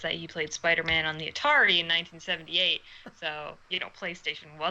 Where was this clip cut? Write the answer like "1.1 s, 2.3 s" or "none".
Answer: 3.6 s